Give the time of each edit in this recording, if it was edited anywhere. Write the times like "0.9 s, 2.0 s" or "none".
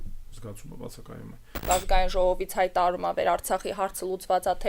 1.6 s